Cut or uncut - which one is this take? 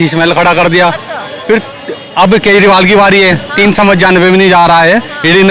uncut